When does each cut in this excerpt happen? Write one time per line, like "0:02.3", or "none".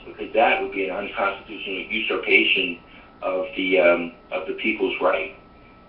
0:04.5